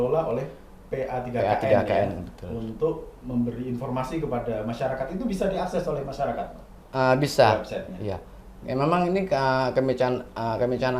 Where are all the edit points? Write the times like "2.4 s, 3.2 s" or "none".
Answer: none